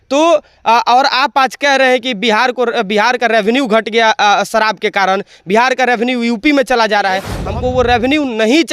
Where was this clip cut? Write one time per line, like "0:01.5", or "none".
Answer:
0:07.4